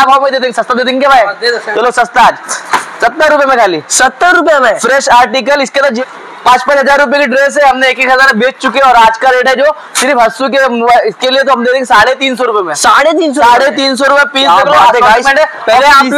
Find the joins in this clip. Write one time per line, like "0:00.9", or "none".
0:06.0